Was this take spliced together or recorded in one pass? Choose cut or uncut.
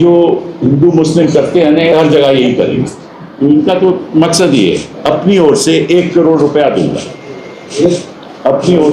cut